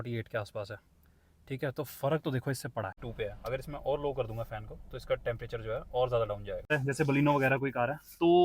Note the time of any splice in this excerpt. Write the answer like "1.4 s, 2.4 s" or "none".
3.0 s, 6.7 s